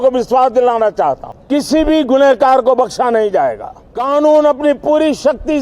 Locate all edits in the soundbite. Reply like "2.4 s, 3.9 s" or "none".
1.3 s, 3.9 s